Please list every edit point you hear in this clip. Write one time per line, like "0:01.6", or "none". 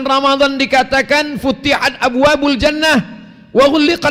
none

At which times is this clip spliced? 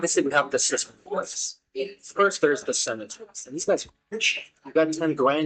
none

